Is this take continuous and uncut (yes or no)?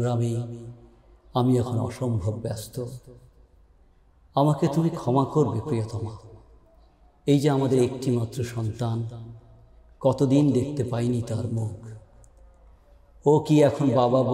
yes